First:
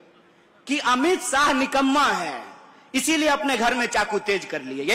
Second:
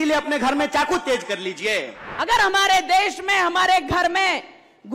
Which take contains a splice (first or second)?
second